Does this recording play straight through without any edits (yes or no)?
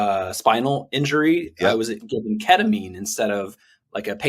yes